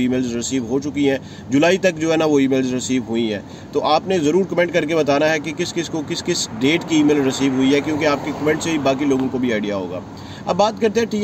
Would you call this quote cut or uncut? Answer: uncut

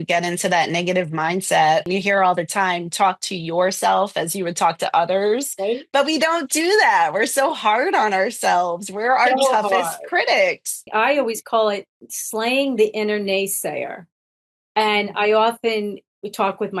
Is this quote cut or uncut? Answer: cut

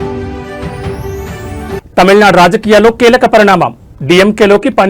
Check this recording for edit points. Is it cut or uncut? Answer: cut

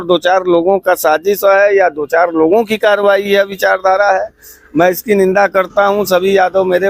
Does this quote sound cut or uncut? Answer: uncut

